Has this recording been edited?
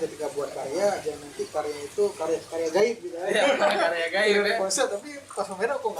no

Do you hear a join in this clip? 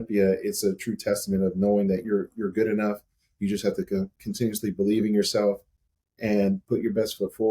no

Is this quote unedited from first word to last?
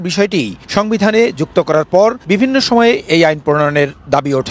yes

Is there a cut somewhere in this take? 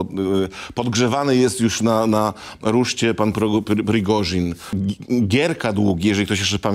yes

